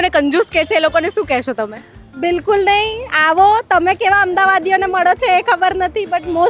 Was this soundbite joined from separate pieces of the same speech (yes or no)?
no